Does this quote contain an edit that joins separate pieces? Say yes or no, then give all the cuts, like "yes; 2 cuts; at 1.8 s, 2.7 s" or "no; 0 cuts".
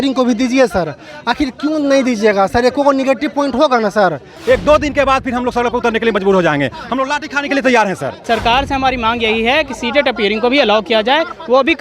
yes; 2 cuts; at 4.3 s, 8.1 s